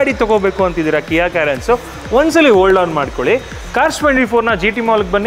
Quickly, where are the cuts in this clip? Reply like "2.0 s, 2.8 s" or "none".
none